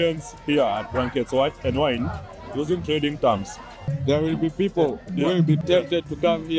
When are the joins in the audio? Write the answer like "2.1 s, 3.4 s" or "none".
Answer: 3.8 s, 5.6 s